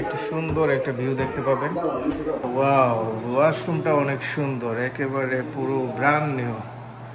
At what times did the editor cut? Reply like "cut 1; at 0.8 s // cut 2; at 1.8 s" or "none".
cut 1; at 2.4 s